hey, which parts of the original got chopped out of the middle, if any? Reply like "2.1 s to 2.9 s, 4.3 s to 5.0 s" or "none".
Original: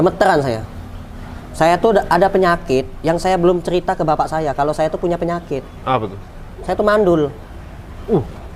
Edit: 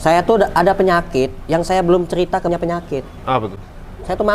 4.0 s to 5.1 s